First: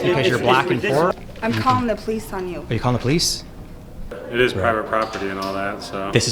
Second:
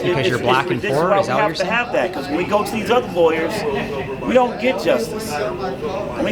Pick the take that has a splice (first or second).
first